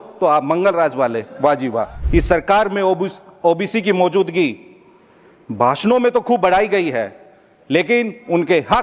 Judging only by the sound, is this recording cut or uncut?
cut